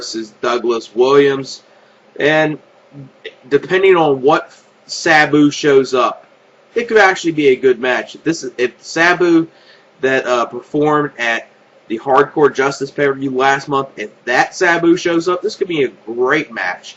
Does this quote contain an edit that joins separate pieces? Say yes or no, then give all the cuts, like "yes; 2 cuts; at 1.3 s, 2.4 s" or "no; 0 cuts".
yes; 1 cut; at 5.6 s